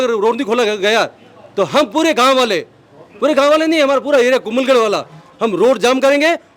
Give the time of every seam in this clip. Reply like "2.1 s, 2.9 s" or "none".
none